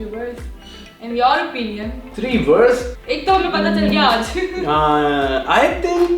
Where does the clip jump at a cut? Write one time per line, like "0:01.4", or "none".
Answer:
0:02.9